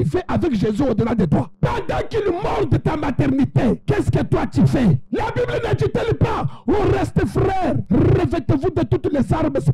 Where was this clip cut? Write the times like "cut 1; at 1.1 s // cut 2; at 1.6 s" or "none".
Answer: cut 1; at 1.5 s // cut 2; at 3.8 s // cut 3; at 5.0 s // cut 4; at 7.8 s

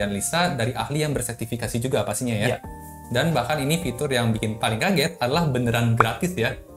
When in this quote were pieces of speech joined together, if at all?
none

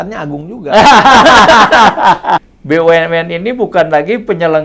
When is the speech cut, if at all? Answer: cut 1; at 2.5 s

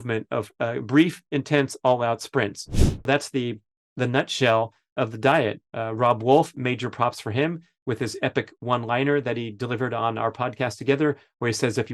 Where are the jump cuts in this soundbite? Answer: cut 1; at 3.1 s

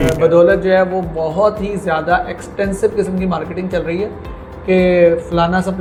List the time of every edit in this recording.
none

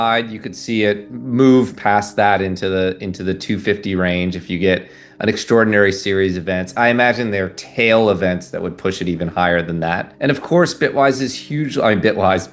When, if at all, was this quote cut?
cut 1; at 10.1 s

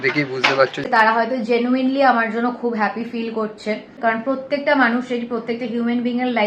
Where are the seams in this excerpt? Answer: cut 1; at 0.8 s // cut 2; at 3.9 s

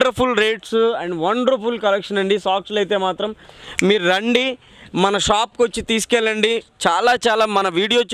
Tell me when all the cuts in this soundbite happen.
none

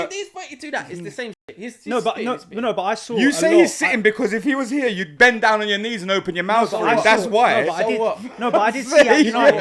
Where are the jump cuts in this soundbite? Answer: none

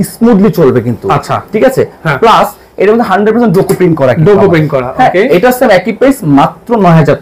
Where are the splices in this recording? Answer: none

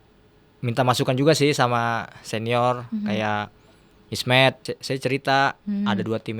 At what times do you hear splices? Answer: cut 1; at 4.6 s

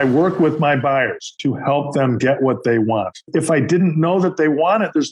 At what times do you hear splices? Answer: cut 1; at 1.2 s // cut 2; at 3.2 s

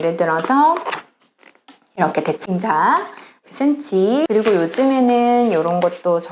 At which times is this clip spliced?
cut 1; at 3.4 s // cut 2; at 4.3 s

